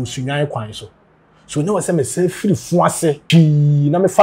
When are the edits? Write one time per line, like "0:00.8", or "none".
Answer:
0:03.2